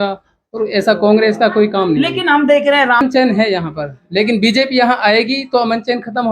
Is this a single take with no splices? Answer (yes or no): no